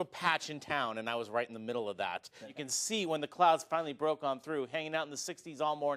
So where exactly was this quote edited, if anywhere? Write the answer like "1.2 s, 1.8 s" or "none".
2.5 s